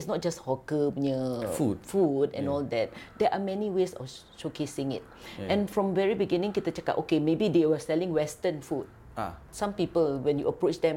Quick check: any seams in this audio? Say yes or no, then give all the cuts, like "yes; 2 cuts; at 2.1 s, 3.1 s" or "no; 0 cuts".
no; 0 cuts